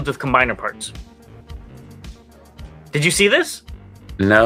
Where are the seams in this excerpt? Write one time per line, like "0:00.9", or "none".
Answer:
none